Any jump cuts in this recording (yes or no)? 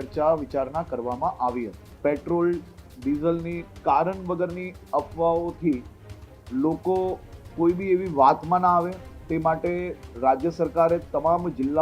yes